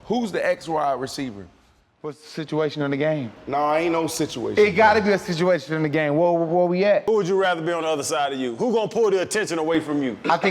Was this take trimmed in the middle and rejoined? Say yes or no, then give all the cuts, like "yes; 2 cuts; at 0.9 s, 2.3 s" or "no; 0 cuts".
yes; 1 cut; at 7.0 s